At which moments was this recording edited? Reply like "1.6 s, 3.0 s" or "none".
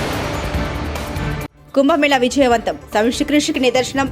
1.5 s

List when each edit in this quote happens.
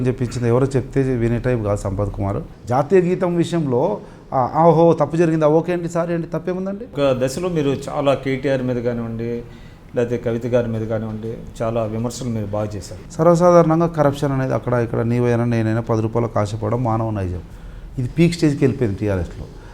2.5 s, 6.9 s, 13.0 s

